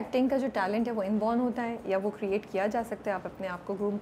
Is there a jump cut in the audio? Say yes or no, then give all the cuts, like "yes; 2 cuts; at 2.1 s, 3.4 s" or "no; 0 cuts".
no; 0 cuts